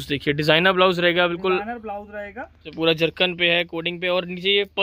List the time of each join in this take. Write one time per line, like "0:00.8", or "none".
0:02.7